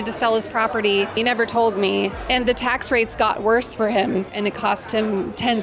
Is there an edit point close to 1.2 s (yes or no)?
yes